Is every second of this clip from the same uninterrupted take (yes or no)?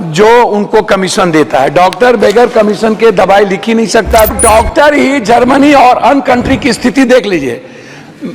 no